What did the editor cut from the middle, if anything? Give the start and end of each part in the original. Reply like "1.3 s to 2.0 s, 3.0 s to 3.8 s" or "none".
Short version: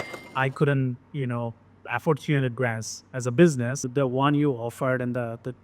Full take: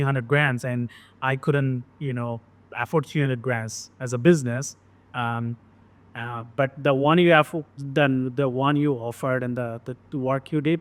4.7 s to 8.3 s